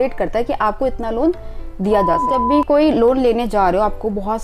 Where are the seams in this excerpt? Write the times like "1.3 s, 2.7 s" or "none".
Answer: 2.4 s